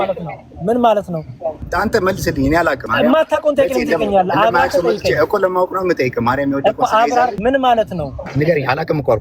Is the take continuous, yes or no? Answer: no